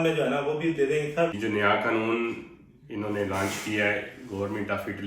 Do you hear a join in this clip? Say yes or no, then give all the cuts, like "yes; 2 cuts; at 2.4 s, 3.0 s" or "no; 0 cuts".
yes; 1 cut; at 1.4 s